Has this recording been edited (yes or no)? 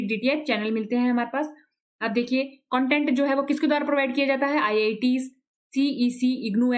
no